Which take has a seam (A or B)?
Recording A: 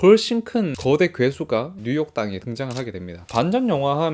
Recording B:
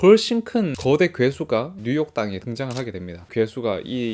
A